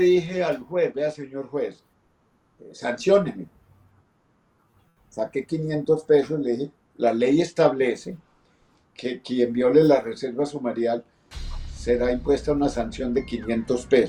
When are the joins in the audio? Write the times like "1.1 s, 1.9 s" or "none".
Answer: none